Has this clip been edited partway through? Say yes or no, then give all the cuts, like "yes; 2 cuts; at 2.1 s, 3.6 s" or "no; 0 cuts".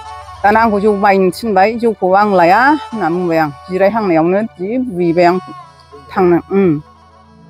no; 0 cuts